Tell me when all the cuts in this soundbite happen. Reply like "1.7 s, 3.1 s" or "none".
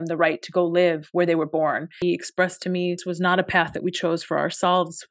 1.9 s, 3.1 s